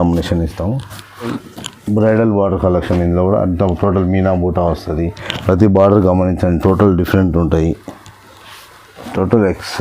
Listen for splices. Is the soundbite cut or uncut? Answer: cut